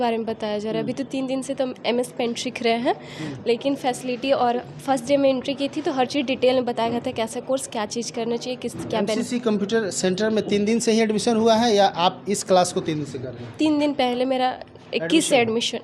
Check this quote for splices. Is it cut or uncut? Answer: uncut